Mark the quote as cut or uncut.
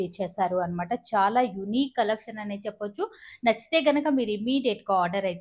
uncut